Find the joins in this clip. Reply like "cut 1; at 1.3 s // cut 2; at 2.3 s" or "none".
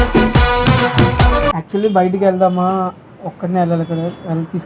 cut 1; at 1.5 s